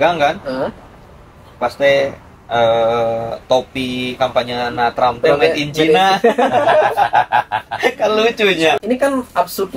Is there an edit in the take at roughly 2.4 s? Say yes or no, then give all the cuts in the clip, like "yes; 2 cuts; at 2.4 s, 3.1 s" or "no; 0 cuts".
no; 1 cut; at 8.8 s